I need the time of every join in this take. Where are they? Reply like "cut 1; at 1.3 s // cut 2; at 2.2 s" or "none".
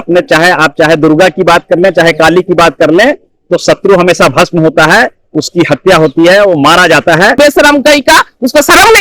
cut 1; at 7.3 s